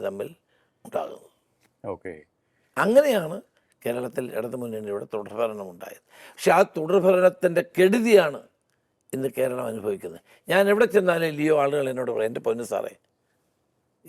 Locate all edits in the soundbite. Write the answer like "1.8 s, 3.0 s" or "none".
none